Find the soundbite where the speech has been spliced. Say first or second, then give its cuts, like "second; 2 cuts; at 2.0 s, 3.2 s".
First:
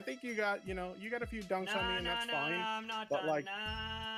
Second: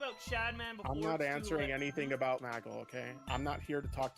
second; 1 cut; at 2.4 s